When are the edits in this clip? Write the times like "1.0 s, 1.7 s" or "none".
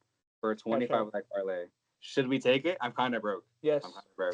none